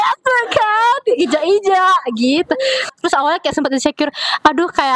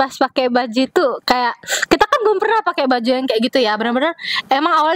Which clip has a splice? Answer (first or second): first